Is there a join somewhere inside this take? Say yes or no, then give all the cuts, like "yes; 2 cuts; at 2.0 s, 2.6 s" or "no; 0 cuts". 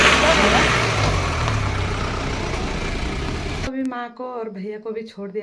yes; 1 cut; at 3.7 s